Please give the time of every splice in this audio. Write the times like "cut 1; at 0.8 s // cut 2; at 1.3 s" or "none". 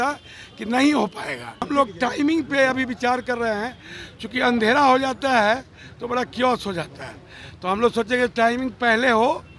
cut 1; at 1.6 s